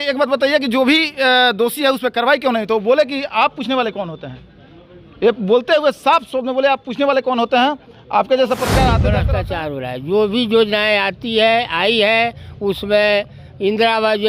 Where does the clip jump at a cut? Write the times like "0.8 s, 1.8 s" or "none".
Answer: 9.2 s